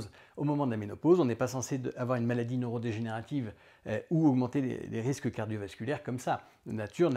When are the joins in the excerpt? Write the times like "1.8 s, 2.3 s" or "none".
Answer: none